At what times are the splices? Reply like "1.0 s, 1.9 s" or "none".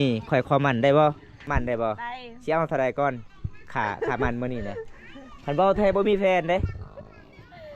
1.3 s